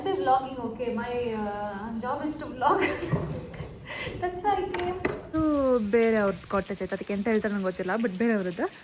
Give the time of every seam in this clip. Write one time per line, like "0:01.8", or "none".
0:05.2